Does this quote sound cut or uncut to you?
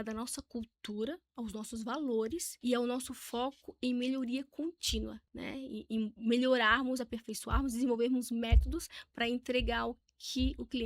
cut